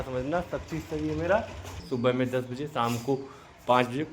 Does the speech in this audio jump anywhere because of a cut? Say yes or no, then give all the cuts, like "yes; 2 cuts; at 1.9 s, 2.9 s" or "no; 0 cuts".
yes; 1 cut; at 1.8 s